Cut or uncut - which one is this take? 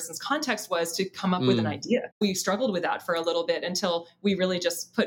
cut